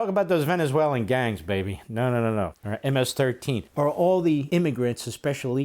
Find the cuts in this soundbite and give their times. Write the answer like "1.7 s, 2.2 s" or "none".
2.6 s, 3.7 s, 4.4 s